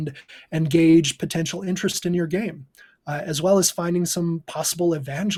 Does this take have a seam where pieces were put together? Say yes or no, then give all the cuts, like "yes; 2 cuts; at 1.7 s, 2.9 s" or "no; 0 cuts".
no; 0 cuts